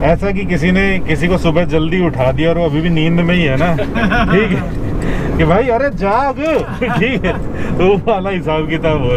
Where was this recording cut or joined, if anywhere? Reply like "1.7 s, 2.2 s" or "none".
none